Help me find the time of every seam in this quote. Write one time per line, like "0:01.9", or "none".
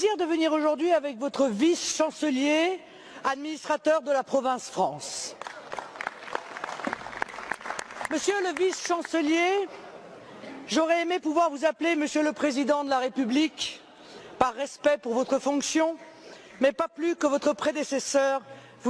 none